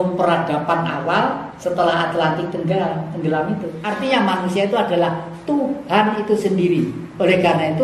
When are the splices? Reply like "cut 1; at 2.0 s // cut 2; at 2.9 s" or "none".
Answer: cut 1; at 3.8 s